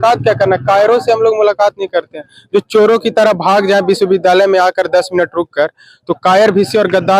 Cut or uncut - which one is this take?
uncut